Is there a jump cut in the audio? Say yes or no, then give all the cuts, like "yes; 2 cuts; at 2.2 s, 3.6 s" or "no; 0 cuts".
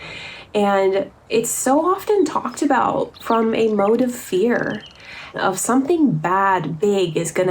yes; 1 cut; at 5.4 s